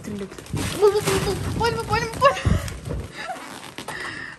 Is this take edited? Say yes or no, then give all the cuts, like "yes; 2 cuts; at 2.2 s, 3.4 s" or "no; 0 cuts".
no; 0 cuts